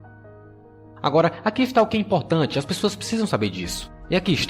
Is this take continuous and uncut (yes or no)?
no